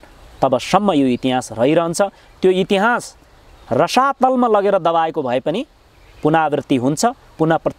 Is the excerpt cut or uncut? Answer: uncut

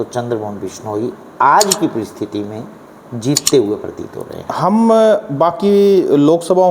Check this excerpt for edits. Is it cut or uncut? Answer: uncut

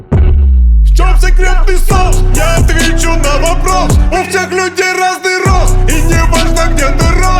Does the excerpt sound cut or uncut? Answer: uncut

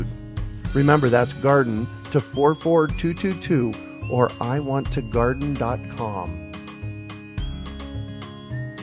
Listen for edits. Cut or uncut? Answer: cut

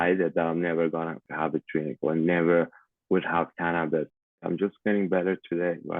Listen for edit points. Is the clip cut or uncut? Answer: cut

